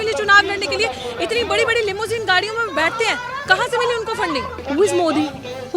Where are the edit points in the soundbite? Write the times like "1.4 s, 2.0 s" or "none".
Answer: 4.6 s